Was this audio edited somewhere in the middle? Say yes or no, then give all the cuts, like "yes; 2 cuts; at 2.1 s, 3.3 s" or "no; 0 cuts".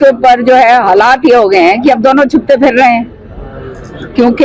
no; 0 cuts